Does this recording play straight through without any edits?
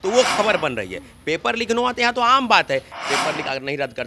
no; 1 cut; at 2.9 s

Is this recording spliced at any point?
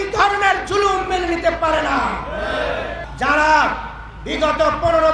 yes; 1 cut; at 3.0 s

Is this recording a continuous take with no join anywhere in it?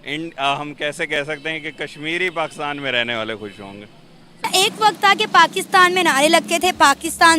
no; 1 cut; at 4.4 s

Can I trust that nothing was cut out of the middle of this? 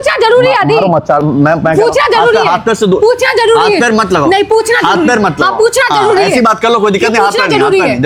yes; 0 cuts

